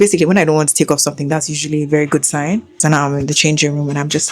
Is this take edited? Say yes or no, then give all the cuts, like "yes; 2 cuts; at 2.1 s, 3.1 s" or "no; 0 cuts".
yes; 1 cut; at 2.7 s